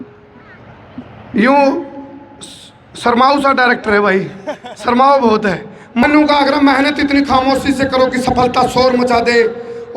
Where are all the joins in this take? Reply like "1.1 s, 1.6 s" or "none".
6.0 s